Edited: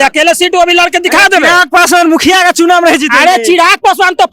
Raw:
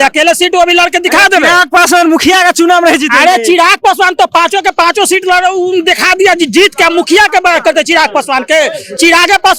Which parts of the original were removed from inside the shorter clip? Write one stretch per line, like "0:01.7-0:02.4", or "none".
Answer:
none